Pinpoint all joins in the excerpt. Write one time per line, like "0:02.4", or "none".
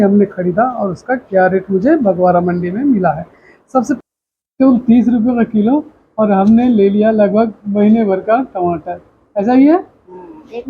0:04.0